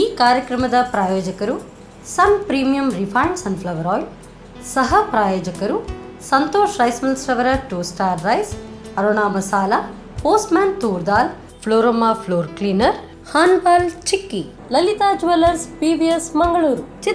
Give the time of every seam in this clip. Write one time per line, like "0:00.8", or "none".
none